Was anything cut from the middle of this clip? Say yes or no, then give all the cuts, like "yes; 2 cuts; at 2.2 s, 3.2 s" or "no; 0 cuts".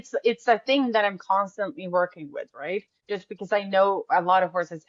yes; 1 cut; at 3.0 s